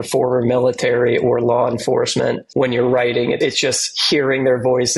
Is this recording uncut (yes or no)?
no